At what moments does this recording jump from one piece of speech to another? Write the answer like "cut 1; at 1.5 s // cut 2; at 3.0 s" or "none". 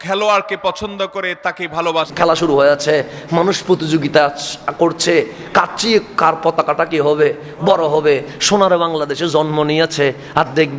cut 1; at 2.1 s